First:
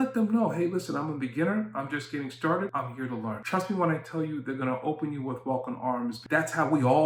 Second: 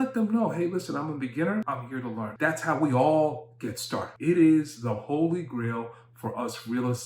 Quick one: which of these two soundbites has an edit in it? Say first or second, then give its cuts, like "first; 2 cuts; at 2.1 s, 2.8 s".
second; 2 cuts; at 2.3 s, 4.1 s